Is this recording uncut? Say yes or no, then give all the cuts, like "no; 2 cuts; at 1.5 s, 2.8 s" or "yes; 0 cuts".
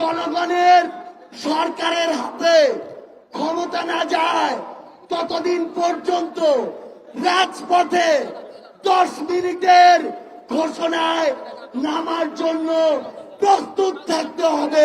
yes; 0 cuts